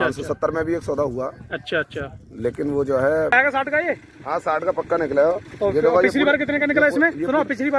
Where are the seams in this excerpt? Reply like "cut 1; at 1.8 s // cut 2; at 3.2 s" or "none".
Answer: cut 1; at 3.3 s